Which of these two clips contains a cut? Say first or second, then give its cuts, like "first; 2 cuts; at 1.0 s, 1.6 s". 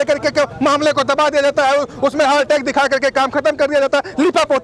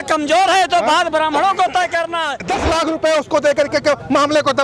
second; 1 cut; at 2.4 s